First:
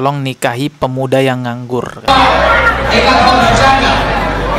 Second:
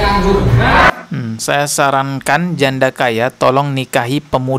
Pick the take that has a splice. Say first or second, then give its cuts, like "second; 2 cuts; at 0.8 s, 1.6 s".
first; 1 cut; at 2.1 s